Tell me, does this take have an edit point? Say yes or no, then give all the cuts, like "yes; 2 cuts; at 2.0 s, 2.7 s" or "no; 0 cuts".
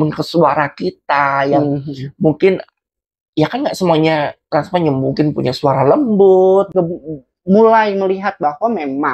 yes; 1 cut; at 6.7 s